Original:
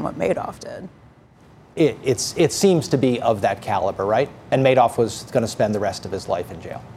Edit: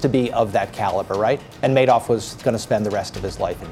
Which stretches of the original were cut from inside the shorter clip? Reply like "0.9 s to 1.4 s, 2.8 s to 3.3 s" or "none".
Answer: none